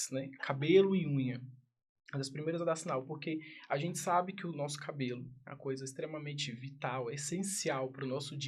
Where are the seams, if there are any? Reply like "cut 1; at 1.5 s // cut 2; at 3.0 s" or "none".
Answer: none